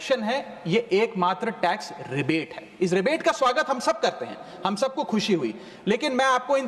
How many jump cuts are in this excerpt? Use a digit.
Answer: 0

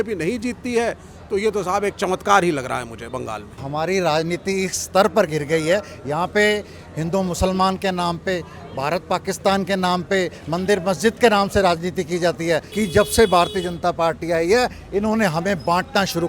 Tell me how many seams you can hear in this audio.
2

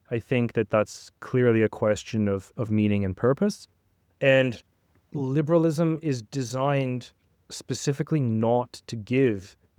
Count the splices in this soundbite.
0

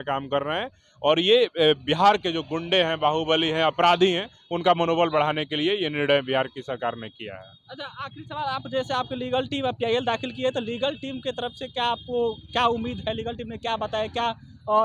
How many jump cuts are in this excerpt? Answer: 0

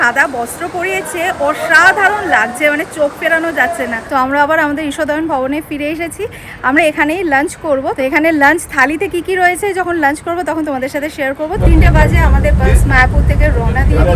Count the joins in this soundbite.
3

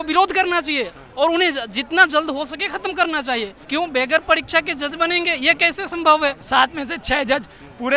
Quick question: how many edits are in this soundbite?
2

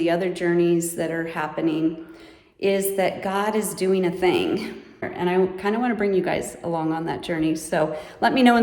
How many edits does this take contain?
1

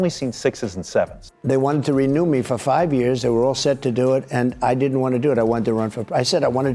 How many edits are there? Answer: 1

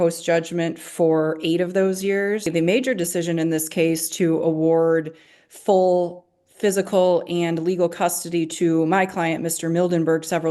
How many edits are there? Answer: 1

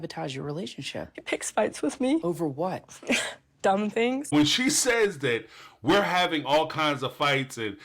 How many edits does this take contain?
3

